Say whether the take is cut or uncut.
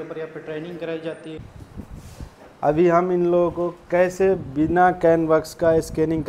cut